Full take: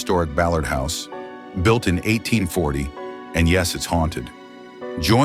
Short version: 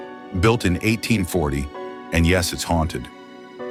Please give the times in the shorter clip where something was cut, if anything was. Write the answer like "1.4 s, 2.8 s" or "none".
none